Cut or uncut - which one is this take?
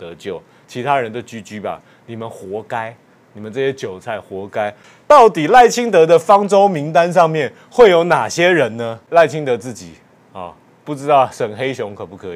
cut